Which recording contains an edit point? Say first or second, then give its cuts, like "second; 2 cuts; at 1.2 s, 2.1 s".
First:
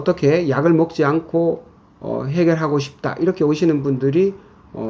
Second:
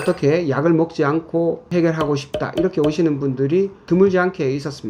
second; 2 cuts; at 1.6 s, 3.8 s